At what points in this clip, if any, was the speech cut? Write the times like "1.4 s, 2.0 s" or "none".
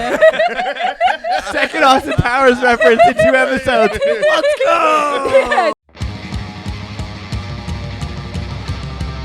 5.8 s